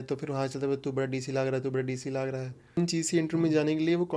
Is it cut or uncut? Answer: cut